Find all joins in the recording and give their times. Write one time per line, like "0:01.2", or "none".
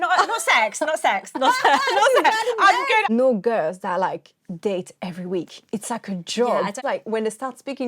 0:03.1
0:06.8